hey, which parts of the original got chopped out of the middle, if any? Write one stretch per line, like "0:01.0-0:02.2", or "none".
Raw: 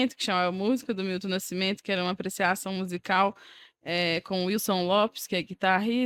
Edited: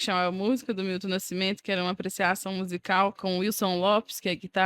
0:03.4-0:04.3